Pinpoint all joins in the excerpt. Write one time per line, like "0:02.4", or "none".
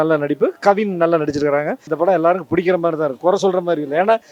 0:01.9